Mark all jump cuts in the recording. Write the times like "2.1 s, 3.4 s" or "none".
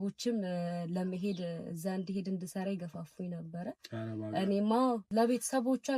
5.1 s